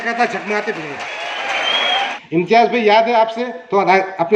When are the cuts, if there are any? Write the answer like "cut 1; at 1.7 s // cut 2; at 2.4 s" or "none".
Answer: cut 1; at 2.1 s